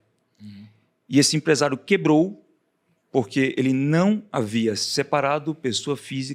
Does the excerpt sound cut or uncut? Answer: uncut